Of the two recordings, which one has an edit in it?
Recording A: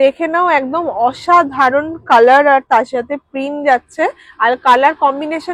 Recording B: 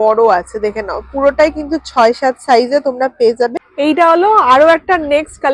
B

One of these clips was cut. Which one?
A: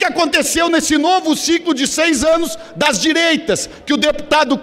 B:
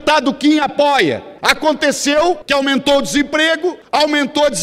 B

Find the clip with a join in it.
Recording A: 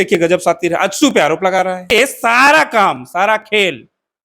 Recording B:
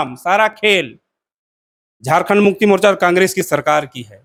A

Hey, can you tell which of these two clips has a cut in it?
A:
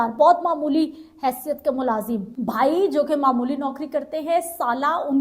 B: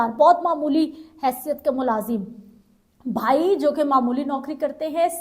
A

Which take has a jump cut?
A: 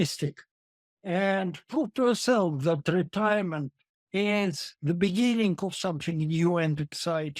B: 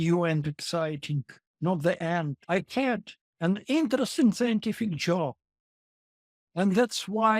B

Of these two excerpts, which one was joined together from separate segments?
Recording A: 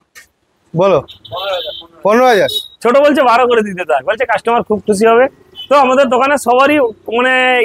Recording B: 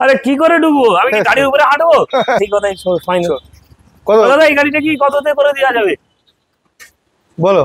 B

